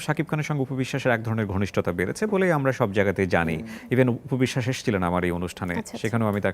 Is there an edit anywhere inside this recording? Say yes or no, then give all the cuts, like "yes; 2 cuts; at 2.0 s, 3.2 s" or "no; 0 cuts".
no; 0 cuts